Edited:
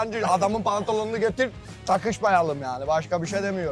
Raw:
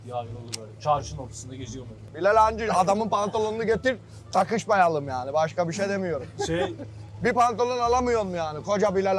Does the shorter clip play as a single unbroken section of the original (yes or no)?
yes